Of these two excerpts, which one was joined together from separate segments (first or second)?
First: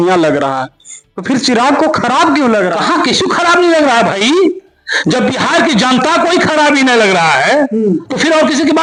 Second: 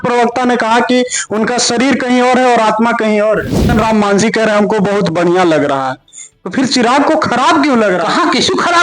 second